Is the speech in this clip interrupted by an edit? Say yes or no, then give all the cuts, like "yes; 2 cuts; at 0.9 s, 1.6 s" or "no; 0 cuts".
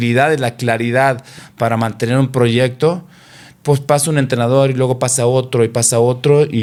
no; 0 cuts